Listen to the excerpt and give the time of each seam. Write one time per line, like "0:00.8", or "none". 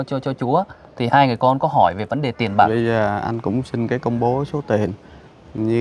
0:02.7

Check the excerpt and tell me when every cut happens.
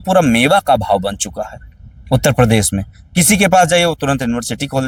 none

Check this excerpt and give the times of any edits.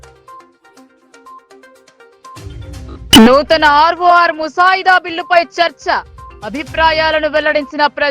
0:01.0
0:02.7

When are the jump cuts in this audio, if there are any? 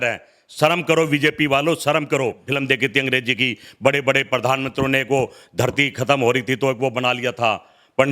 0:02.4

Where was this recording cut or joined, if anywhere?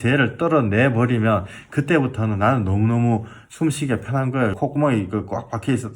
0:03.4
0:04.5

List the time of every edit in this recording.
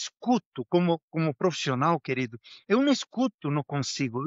none

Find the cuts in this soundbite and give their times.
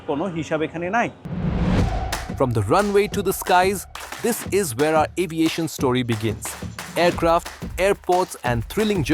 0:01.2

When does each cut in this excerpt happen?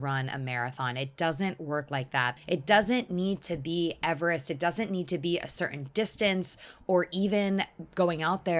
0:02.3

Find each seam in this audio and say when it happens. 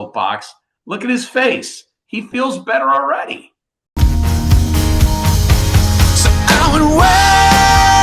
0:03.8

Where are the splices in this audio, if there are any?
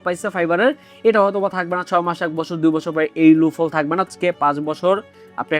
0:04.1

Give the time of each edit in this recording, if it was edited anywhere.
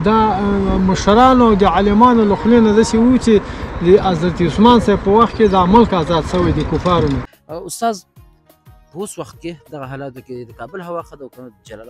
0:07.3

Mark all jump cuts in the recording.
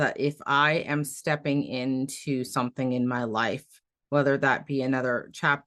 none

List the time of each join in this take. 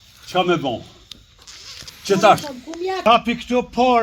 0:03.0

